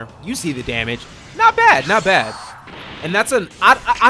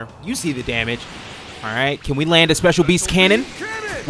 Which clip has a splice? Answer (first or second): second